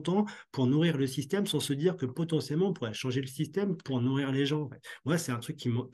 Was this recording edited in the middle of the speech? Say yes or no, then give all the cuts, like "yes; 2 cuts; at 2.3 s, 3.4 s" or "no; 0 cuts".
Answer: no; 0 cuts